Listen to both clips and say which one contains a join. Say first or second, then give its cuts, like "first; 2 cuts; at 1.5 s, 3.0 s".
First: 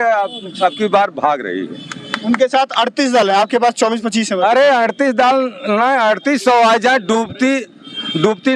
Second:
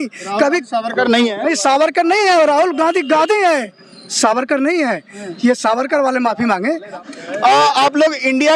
second; 1 cut; at 7.0 s